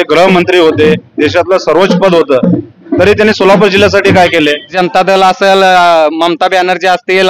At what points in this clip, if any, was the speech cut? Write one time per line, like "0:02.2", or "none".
0:04.7